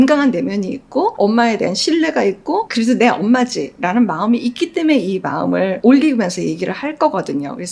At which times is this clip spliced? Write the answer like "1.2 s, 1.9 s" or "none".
none